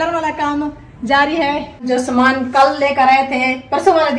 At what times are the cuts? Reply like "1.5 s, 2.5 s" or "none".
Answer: 1.8 s

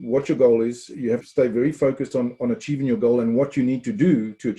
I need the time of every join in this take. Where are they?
1.3 s

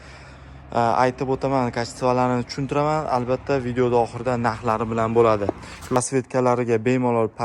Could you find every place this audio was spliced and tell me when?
6.0 s

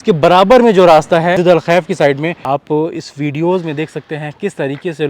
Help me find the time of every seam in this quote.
1.4 s, 2.4 s

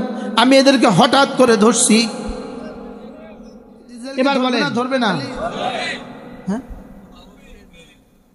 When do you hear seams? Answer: 4.7 s

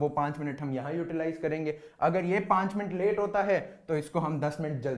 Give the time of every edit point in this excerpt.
none

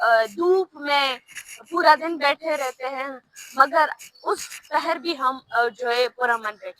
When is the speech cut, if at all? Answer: none

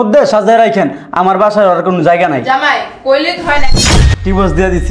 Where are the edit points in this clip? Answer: 3.7 s

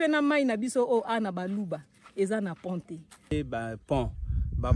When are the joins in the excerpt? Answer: 3.3 s

